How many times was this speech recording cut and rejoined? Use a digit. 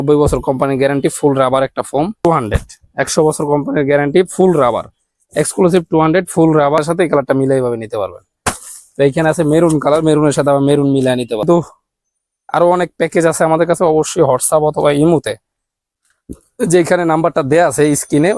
3